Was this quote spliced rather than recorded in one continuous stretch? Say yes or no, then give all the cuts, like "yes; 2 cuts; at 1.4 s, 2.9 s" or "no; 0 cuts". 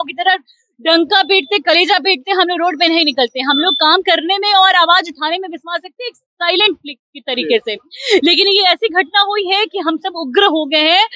no; 0 cuts